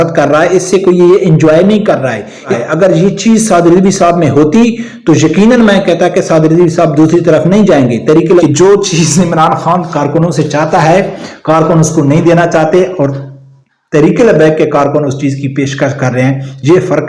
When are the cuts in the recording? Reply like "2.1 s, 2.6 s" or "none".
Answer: 2.5 s, 8.4 s